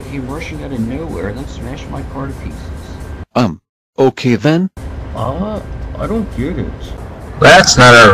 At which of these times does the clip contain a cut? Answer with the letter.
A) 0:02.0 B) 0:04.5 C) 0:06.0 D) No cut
C